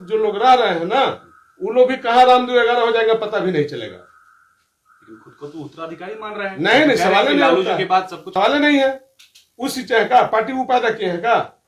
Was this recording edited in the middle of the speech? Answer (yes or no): no